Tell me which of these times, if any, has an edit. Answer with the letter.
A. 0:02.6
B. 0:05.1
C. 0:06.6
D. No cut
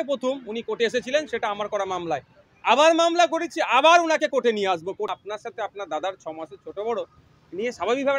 B